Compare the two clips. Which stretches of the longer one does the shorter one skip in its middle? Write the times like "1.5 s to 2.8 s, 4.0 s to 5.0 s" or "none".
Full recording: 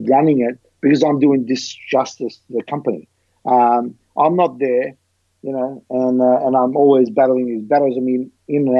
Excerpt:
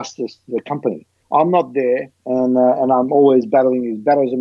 3.2 s to 4.0 s, 5.0 s to 5.8 s

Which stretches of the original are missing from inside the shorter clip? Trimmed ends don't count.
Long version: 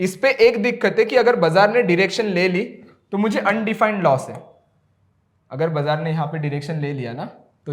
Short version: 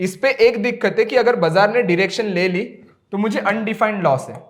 none

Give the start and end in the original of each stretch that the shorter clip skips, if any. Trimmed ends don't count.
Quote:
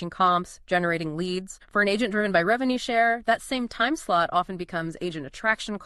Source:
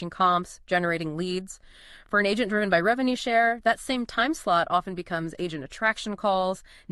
1.6 s to 1.9 s

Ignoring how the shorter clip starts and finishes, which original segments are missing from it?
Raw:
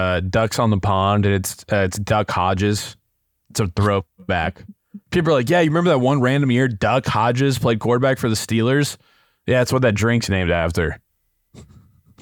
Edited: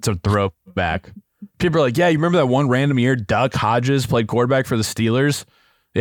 none

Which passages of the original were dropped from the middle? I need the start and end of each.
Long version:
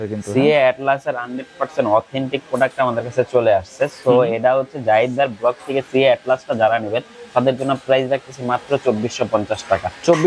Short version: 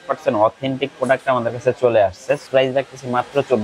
4.0 s to 7.8 s

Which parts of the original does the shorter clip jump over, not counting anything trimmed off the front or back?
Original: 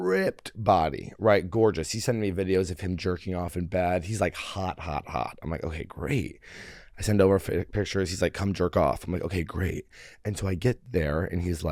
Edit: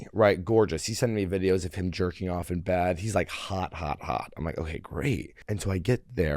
6.4 s to 10.1 s

